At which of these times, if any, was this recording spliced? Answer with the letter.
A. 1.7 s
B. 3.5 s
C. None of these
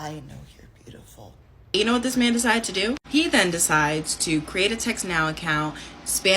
A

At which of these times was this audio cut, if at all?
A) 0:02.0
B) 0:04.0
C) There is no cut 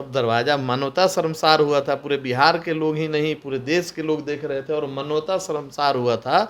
C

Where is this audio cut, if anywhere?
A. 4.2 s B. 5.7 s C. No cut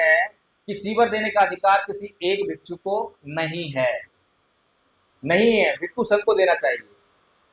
C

